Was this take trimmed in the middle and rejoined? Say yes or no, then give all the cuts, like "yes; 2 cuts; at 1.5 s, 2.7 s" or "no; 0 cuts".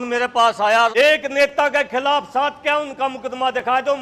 yes; 1 cut; at 0.9 s